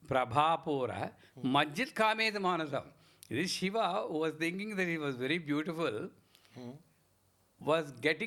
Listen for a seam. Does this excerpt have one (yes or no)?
no